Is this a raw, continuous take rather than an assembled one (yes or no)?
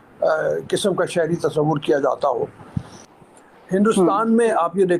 no